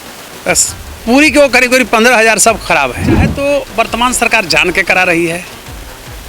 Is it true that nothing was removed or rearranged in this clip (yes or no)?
no